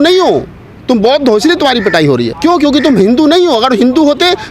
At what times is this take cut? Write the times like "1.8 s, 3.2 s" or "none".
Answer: 2.3 s